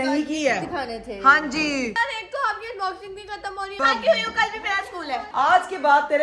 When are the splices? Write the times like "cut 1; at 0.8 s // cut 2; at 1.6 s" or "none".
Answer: cut 1; at 2.0 s // cut 2; at 3.8 s // cut 3; at 5.3 s

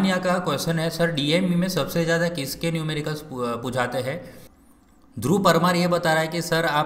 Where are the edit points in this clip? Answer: cut 1; at 4.3 s

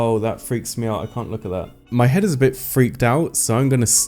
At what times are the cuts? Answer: cut 1; at 1.8 s

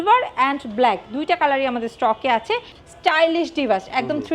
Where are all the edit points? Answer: cut 1; at 2.7 s

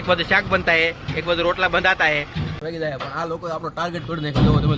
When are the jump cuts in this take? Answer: cut 1; at 2.6 s

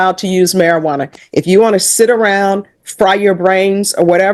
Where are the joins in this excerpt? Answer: none

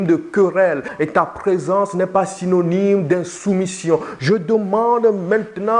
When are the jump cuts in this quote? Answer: cut 1; at 0.9 s

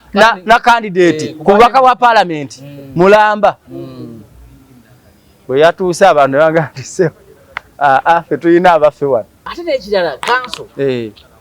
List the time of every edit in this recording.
cut 1; at 9.4 s

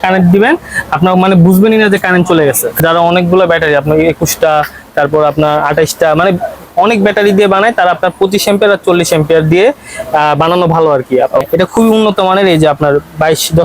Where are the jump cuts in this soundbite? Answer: cut 1; at 2.8 s // cut 2; at 11.4 s

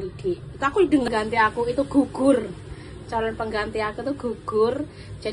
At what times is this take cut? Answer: cut 1; at 1.1 s

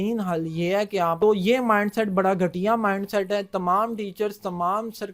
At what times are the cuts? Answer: cut 1; at 1.2 s

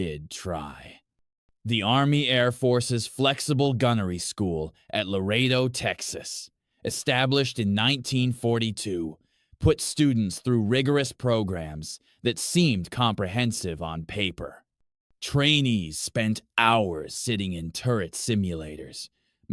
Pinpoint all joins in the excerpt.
none

